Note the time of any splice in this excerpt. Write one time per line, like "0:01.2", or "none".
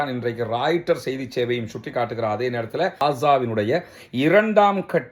0:03.0

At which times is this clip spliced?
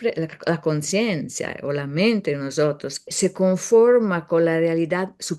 0:03.1

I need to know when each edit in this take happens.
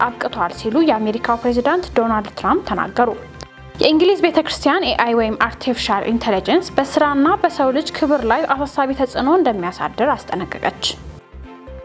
0:10.9

